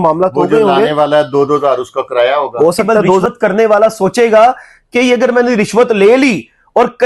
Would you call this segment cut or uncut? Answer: cut